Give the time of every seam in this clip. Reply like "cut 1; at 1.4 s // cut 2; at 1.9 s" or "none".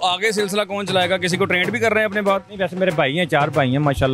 none